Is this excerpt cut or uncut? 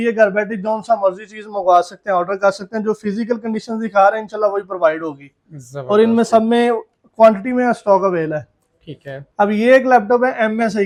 uncut